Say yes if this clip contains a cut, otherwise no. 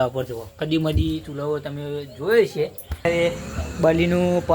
yes